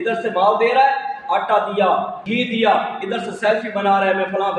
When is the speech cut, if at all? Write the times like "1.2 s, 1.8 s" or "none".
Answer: 2.2 s